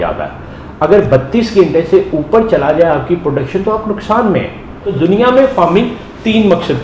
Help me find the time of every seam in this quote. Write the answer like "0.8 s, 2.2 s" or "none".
4.9 s